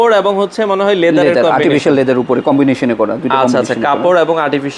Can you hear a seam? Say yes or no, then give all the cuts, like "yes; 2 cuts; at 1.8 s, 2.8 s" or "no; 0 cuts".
no; 0 cuts